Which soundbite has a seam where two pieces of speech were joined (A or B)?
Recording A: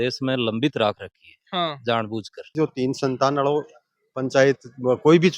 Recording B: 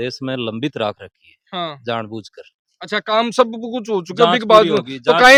A